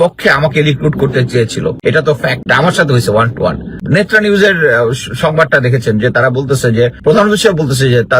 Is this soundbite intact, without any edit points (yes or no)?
no